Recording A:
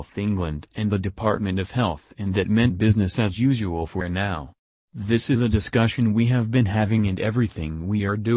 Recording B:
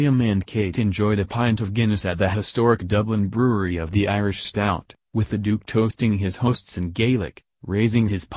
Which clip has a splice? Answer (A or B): A